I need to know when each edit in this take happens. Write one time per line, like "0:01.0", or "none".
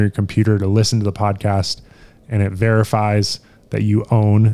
none